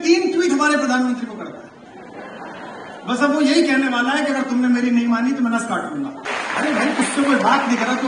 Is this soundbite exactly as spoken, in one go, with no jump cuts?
no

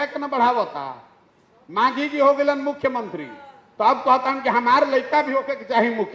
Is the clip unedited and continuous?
yes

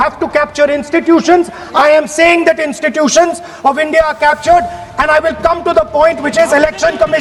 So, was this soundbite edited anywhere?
no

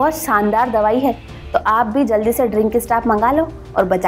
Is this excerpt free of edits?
yes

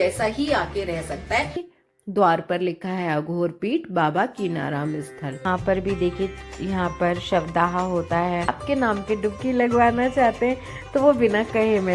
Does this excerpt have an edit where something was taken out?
yes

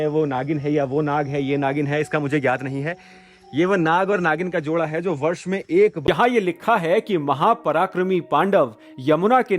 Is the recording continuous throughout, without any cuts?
no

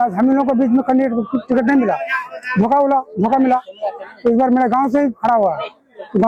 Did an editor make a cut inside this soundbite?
no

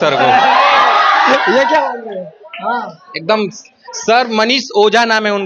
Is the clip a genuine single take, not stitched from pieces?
yes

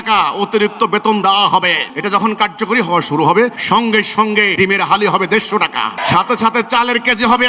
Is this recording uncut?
no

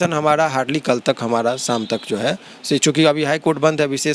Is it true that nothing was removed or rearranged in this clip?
yes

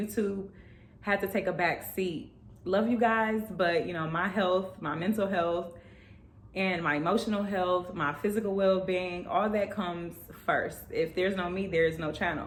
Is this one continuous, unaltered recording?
yes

